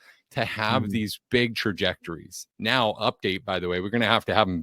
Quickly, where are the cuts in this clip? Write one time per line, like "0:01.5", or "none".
0:02.5